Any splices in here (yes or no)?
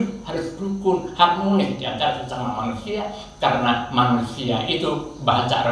no